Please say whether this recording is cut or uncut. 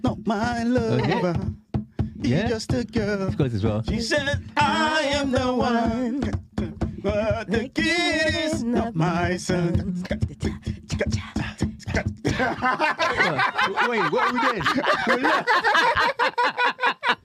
uncut